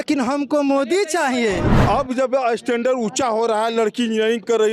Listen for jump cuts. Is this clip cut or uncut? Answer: cut